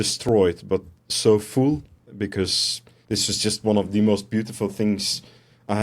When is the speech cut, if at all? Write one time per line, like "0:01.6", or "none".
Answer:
0:02.4